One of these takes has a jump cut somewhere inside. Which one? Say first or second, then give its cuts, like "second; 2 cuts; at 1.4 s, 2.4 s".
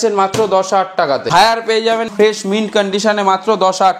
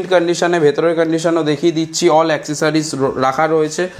first; 2 cuts; at 1.3 s, 2.1 s